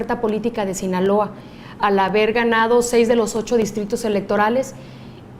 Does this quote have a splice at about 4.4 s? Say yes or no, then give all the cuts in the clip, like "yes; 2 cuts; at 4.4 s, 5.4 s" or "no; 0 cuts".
yes; 1 cut; at 4.4 s